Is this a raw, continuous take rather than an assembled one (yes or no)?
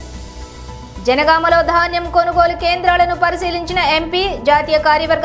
no